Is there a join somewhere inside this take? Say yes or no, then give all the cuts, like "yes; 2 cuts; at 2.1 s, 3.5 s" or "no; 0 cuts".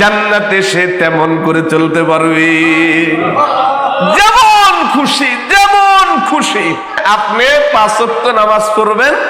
yes; 1 cut; at 7.0 s